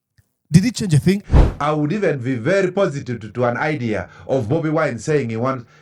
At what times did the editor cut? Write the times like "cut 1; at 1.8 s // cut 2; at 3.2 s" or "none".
cut 1; at 1.2 s